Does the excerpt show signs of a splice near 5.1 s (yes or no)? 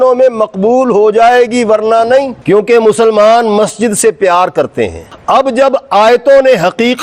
yes